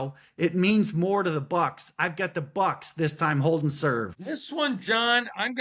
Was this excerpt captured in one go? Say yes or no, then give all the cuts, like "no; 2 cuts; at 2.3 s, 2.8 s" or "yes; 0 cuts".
no; 1 cut; at 4.2 s